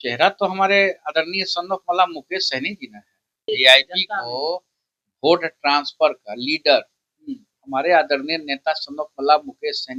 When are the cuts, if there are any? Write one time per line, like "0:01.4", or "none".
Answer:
0:03.5